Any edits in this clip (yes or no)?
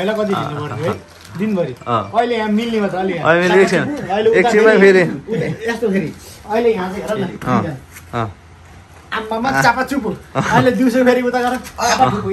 no